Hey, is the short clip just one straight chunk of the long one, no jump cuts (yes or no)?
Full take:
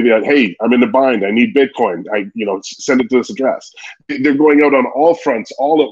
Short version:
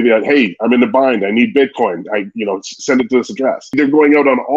no